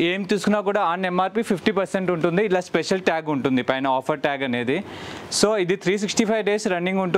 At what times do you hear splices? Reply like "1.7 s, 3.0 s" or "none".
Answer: none